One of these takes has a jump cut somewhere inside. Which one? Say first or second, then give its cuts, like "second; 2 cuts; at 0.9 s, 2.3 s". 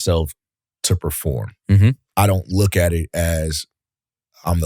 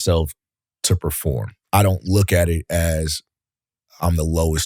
second; 1 cut; at 1.6 s